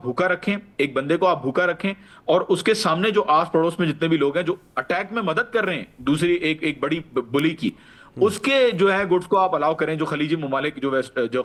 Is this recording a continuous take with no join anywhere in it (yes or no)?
yes